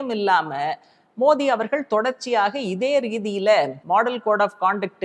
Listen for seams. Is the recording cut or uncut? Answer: cut